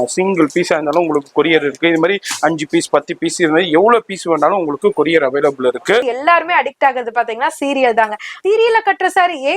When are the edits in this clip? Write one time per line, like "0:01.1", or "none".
0:06.0
0:08.3